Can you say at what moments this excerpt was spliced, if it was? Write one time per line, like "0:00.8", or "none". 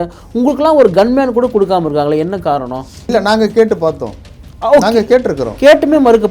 0:03.1